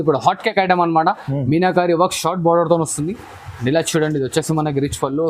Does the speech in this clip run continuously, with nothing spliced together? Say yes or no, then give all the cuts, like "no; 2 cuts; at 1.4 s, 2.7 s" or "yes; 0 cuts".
yes; 0 cuts